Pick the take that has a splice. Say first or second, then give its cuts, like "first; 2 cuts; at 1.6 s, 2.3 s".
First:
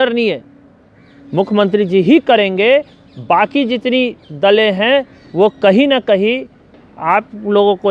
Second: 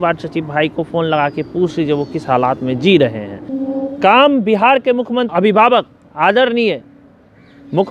second; 2 cuts; at 3.5 s, 5.3 s